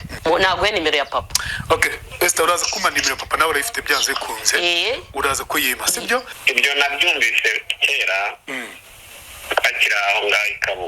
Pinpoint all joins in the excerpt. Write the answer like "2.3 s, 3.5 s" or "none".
none